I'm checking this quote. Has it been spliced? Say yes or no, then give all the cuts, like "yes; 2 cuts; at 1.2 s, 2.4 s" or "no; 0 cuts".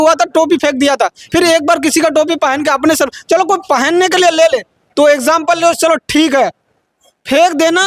no; 0 cuts